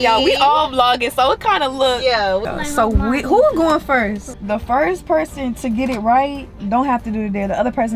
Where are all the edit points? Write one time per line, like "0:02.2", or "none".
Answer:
0:02.4
0:04.3